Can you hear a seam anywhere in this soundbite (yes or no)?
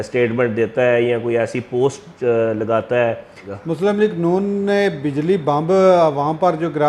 yes